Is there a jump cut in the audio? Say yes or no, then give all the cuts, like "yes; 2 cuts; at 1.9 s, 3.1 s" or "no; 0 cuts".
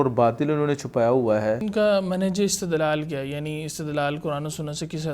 yes; 1 cut; at 1.6 s